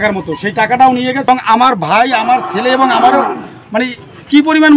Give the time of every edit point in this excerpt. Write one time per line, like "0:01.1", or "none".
0:01.3